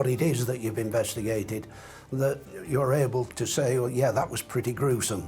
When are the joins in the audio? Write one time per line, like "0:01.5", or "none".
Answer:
0:02.5
0:03.3